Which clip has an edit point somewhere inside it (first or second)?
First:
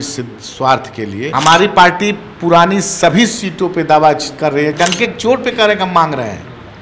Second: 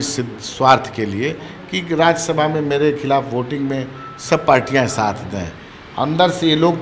first